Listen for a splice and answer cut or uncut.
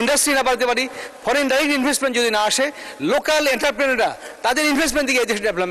uncut